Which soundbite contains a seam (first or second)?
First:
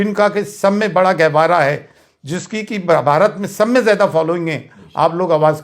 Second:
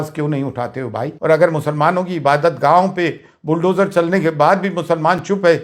second